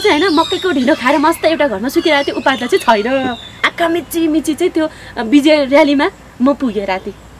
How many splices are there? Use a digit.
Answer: 1